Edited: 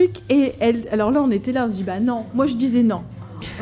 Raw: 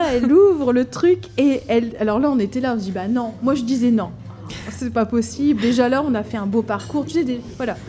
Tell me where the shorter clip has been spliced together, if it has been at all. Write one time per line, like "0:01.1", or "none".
none